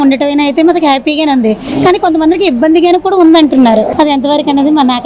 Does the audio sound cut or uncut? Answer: uncut